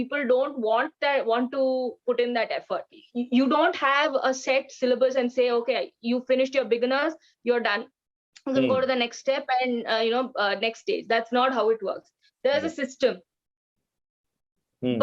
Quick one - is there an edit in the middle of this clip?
yes; 1 cut; at 3.0 s

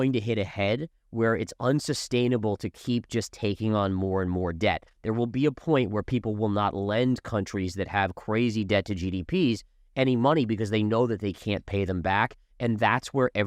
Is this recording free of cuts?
yes; 0 cuts

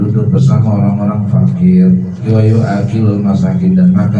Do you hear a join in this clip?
yes; 1 cut; at 2.2 s

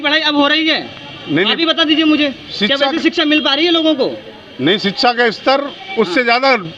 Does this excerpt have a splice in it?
no; 0 cuts

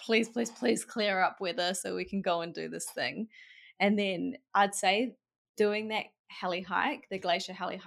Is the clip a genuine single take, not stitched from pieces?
yes; 0 cuts

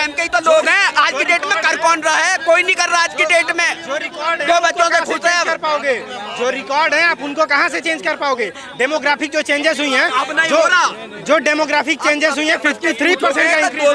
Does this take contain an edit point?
no; 0 cuts

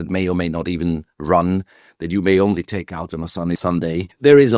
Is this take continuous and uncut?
no; 1 cut; at 3.6 s

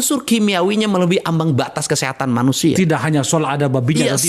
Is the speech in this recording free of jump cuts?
yes; 0 cuts

